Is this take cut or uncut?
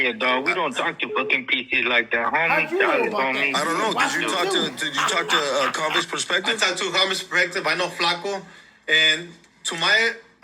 uncut